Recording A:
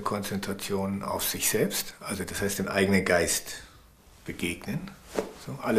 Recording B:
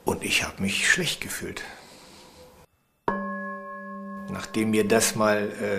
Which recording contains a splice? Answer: B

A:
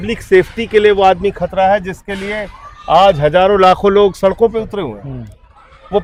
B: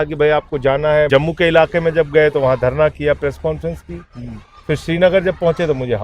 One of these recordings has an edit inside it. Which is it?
B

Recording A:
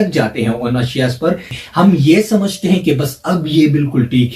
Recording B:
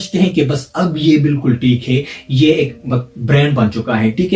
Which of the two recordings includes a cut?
A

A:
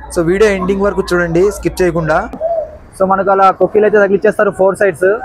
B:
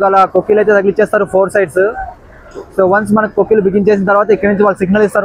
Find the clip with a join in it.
A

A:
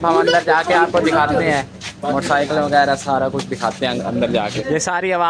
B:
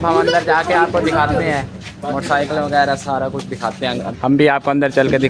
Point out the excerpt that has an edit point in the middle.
B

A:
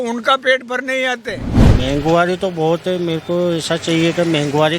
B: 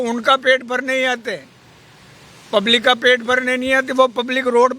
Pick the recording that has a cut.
A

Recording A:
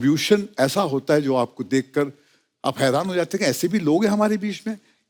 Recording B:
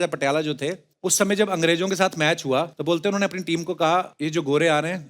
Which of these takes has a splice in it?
B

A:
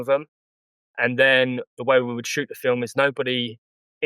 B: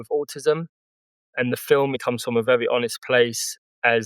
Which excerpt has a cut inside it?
B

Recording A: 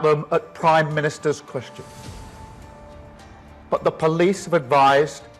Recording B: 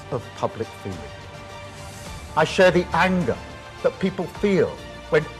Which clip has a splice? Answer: A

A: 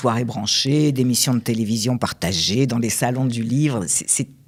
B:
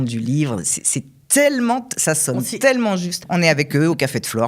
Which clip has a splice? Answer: B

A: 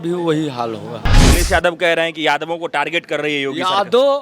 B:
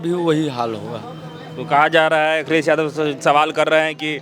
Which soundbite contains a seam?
A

